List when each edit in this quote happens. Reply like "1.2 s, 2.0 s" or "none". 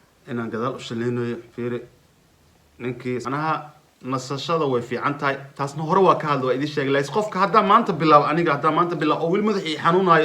3.2 s